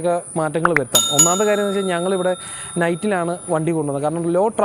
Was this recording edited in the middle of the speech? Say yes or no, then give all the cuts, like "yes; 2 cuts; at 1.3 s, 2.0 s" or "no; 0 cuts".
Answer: no; 0 cuts